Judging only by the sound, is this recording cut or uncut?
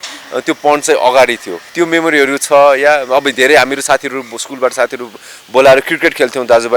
cut